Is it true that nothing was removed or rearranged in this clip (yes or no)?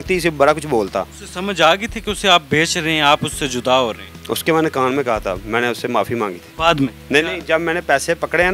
yes